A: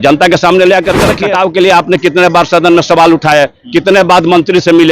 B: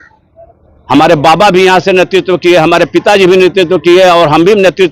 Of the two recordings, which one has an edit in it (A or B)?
A